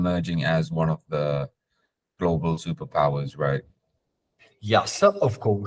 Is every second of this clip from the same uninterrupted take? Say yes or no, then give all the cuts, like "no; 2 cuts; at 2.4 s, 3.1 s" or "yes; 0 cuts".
yes; 0 cuts